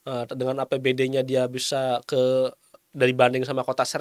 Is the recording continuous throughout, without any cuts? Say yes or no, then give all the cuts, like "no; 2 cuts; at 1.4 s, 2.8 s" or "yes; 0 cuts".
yes; 0 cuts